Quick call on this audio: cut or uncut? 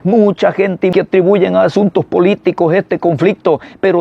cut